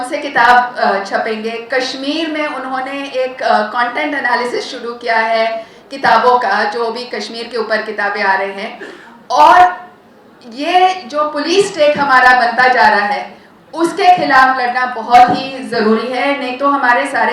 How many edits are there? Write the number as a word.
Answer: zero